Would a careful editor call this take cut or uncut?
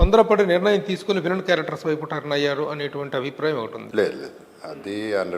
cut